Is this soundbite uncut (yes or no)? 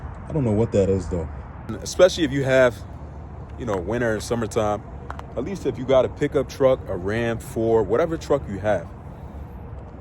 no